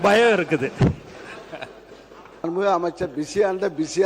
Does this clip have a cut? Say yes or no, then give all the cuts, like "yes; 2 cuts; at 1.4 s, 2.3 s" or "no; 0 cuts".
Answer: yes; 1 cut; at 2.5 s